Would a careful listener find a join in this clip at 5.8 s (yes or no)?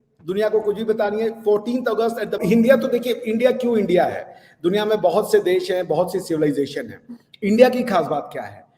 no